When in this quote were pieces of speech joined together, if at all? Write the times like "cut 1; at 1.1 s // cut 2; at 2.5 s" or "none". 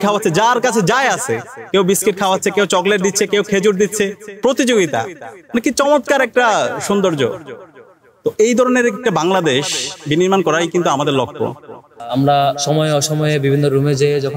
cut 1; at 12.0 s